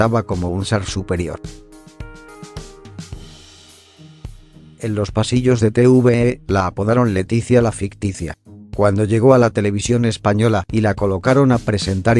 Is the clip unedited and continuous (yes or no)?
no